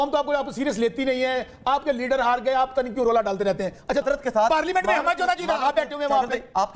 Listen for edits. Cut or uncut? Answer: cut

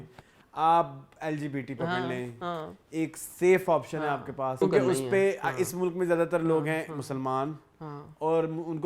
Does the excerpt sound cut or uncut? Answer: cut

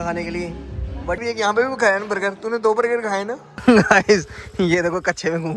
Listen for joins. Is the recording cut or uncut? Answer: cut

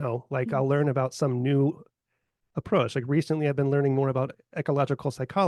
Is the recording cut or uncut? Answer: uncut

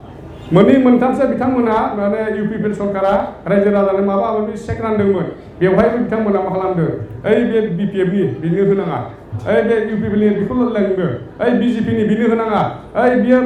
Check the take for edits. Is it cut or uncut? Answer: uncut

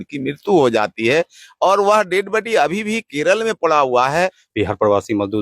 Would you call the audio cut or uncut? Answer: cut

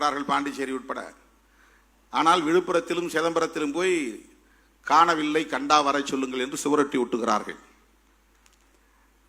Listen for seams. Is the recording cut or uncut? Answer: uncut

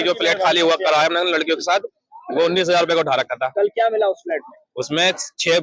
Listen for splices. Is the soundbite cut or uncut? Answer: uncut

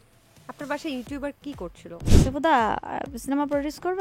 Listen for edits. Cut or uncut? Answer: cut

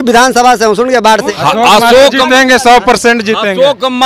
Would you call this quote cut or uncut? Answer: cut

